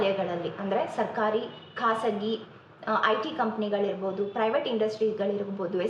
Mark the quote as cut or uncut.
uncut